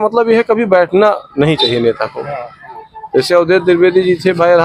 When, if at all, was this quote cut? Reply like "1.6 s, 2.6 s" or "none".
none